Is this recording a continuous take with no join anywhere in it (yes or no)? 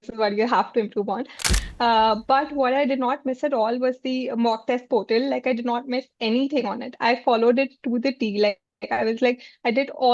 no